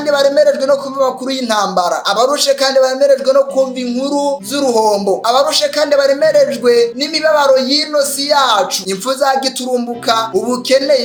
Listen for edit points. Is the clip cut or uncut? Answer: uncut